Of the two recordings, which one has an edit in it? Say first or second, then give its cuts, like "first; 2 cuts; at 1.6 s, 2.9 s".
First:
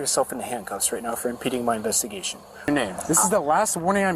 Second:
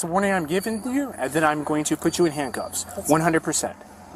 first; 1 cut; at 2.7 s